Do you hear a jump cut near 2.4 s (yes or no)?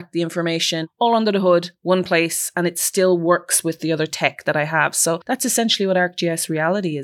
no